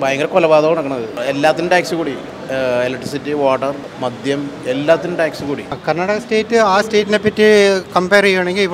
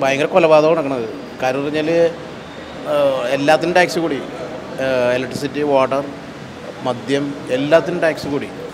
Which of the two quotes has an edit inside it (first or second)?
first